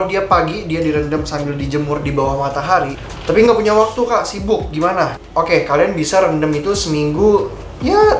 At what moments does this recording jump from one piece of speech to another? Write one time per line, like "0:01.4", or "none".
0:03.1